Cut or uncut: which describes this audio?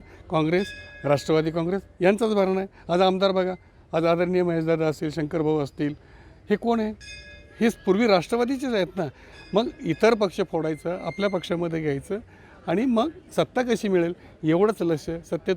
uncut